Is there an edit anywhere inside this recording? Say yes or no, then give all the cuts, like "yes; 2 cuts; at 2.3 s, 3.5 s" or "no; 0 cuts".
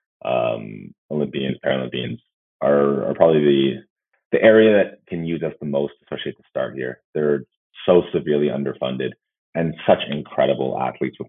no; 0 cuts